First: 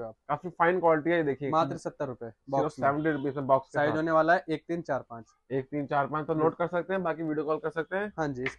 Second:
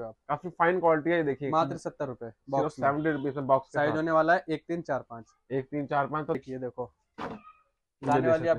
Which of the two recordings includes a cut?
second; 1 cut; at 6.4 s

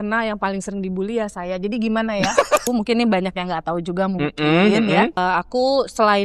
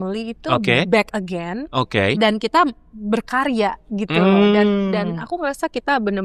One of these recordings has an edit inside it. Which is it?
first; 2 cuts; at 2.7 s, 5.2 s

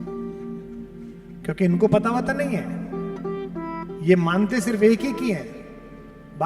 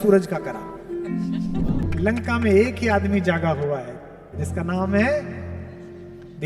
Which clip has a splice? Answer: second; 1 cut; at 1.8 s

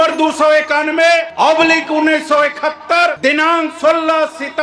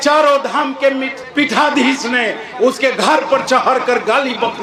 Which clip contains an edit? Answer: first; 2 cuts; at 1.3 s, 3.2 s

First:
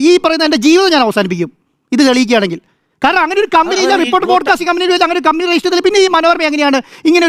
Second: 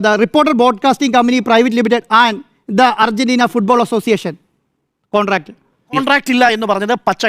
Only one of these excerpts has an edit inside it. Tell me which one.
second; 1 cut; at 6.0 s

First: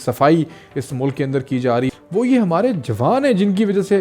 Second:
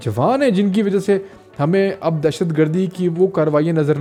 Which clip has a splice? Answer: first; 1 cut; at 1.9 s

